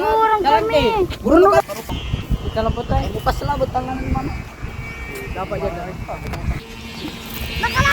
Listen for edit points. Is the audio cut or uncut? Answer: cut